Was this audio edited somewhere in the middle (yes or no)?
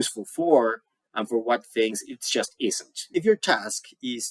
yes